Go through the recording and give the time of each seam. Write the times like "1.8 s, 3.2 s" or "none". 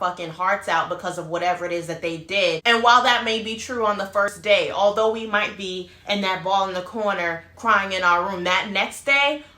2.6 s